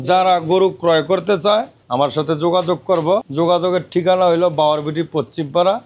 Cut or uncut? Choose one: cut